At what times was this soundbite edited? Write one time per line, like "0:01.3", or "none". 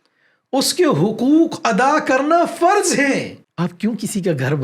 0:03.4